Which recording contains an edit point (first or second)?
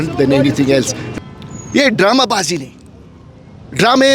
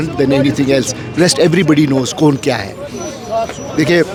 first